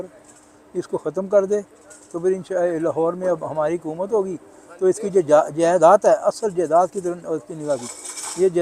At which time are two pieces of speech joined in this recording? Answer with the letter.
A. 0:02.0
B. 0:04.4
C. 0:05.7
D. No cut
D